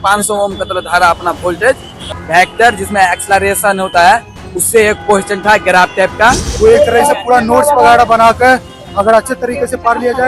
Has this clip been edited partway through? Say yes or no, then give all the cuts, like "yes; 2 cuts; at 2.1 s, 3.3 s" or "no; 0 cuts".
yes; 2 cuts; at 2.0 s, 6.5 s